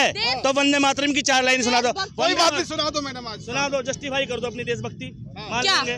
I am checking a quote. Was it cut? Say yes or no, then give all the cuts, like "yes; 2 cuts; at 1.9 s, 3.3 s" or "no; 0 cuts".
no; 0 cuts